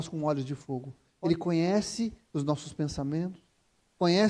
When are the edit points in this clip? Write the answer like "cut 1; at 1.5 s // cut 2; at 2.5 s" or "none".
cut 1; at 1.1 s